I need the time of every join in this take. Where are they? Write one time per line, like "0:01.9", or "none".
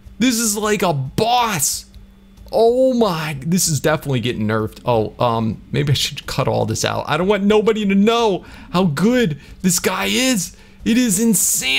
none